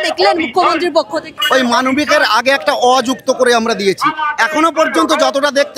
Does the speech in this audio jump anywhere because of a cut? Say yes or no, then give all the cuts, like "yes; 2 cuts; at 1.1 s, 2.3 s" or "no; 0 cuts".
yes; 1 cut; at 1.4 s